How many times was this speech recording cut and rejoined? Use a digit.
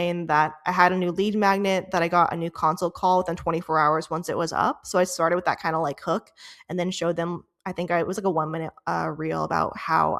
0